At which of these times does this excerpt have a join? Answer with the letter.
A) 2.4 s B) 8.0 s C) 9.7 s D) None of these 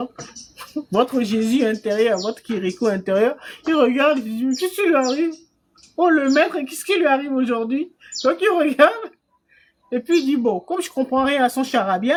D